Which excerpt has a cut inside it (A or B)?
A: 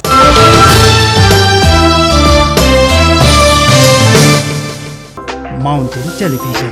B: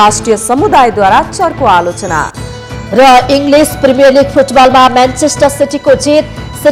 A